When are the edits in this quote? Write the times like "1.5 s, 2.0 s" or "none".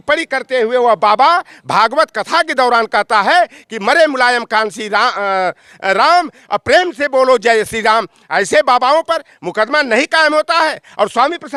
none